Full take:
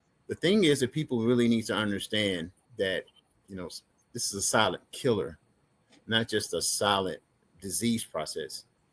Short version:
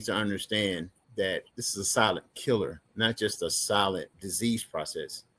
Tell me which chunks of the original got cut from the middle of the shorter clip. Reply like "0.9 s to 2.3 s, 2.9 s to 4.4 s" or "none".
3.2 s to 4.1 s, 5.4 s to 5.9 s, 7.3 s to 7.6 s